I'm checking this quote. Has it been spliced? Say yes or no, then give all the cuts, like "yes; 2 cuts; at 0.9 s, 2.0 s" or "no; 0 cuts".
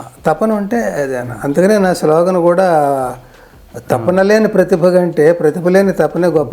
no; 0 cuts